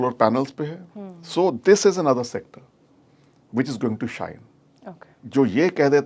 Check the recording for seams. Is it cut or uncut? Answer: cut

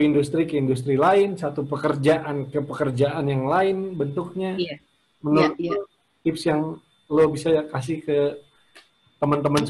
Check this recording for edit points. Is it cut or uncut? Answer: uncut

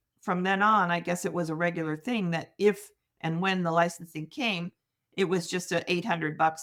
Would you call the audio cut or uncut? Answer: uncut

